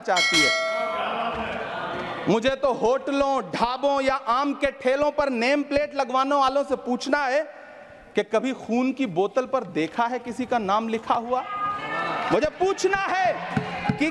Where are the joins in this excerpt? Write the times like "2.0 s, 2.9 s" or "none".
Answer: none